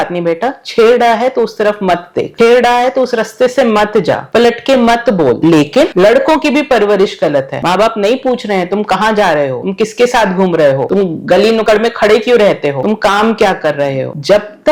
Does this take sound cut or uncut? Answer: uncut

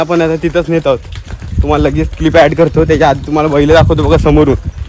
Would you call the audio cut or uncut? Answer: uncut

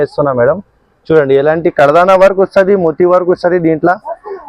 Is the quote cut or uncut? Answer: uncut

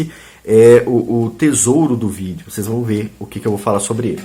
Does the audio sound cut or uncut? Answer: uncut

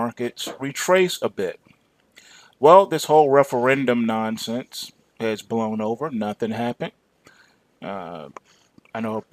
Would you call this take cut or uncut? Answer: cut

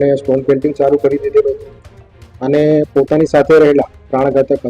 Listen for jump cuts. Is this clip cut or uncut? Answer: uncut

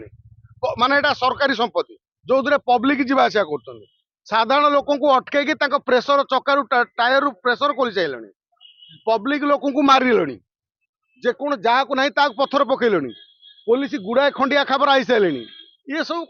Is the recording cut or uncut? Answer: uncut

